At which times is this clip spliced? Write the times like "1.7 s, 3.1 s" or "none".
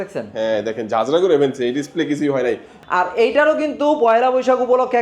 2.7 s